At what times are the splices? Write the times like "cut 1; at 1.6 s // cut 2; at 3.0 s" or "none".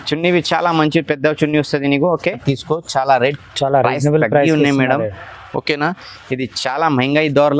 cut 1; at 2.4 s